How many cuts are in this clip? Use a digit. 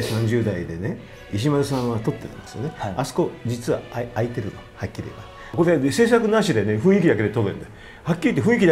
2